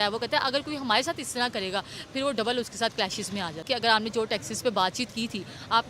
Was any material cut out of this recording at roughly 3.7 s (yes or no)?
yes